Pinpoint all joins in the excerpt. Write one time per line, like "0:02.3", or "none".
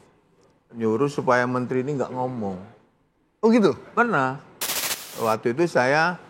0:05.1